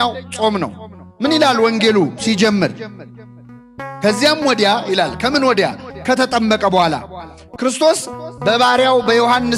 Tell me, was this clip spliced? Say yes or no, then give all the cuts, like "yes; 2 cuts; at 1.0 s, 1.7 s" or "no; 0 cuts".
no; 0 cuts